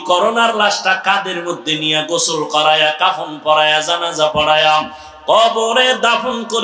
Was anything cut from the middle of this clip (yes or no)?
no